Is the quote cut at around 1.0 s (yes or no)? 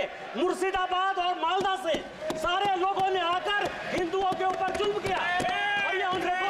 no